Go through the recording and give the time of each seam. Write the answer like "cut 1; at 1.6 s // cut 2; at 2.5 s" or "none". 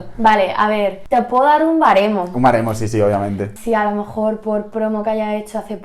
cut 1; at 1.0 s // cut 2; at 3.5 s